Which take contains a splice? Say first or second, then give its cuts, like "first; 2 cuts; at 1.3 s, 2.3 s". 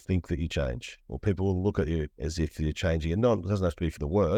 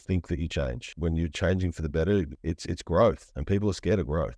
second; 1 cut; at 0.9 s